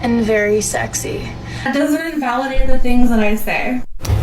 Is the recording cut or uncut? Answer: cut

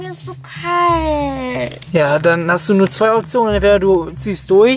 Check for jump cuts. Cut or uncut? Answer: uncut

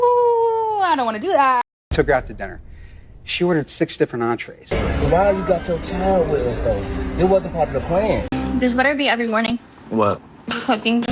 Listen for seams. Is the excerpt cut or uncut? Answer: cut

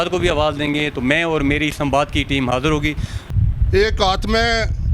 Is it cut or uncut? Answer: cut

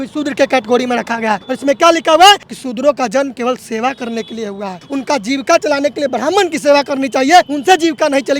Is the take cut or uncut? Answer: cut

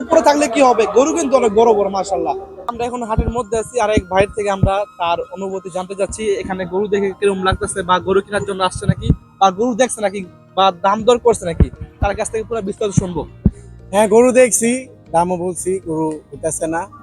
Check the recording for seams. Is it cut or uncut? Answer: cut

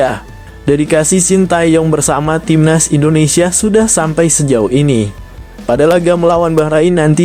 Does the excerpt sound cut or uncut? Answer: uncut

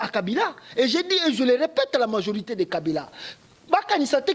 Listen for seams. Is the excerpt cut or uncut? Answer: uncut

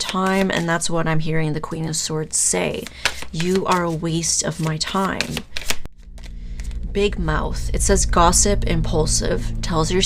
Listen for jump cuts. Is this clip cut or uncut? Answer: cut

